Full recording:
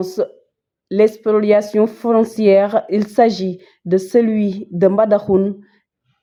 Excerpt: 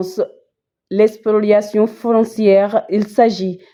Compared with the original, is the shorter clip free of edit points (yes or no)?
yes